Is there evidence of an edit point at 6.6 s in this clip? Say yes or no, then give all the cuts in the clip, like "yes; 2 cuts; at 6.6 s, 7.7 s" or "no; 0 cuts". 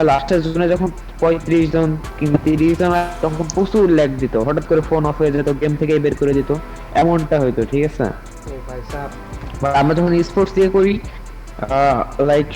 no; 0 cuts